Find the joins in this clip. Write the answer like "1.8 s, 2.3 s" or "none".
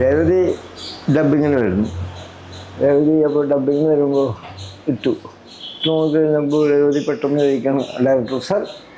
none